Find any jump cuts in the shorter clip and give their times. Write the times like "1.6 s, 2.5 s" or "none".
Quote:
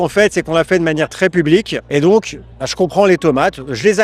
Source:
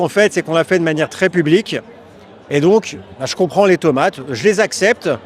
1.8 s